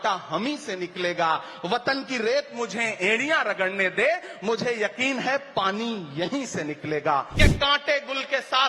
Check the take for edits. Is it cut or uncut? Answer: cut